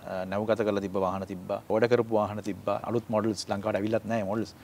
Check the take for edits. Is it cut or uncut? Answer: cut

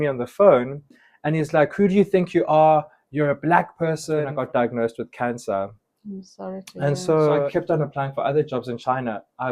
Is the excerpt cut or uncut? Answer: cut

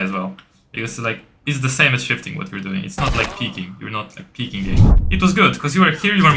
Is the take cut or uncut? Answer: cut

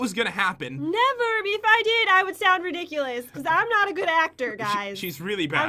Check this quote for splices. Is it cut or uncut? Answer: uncut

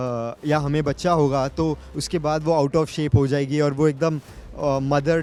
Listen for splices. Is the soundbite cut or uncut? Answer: uncut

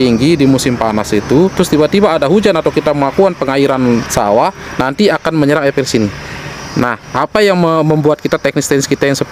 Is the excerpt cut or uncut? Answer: cut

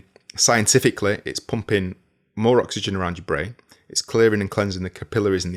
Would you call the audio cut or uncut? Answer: uncut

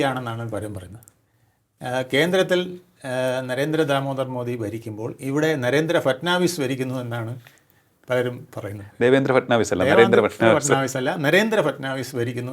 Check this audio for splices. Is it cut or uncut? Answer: uncut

